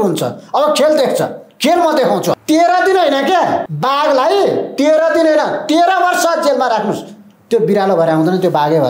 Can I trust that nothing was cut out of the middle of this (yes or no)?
no